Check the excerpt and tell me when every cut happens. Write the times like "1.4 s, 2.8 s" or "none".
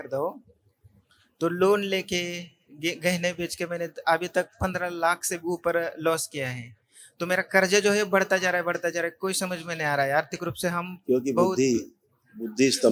none